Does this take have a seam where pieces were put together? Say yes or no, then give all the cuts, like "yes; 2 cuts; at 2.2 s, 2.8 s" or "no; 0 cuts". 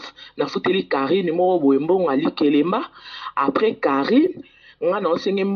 yes; 1 cut; at 1.3 s